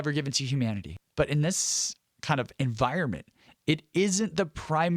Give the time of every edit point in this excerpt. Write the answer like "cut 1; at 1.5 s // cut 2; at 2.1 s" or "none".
cut 1; at 1.0 s